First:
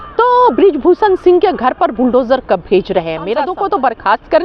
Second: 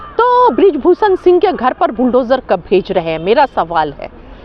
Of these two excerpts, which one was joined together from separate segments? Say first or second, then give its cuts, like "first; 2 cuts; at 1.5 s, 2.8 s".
first; 1 cut; at 3.4 s